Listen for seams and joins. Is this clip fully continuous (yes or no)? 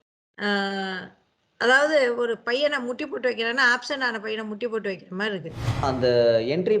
no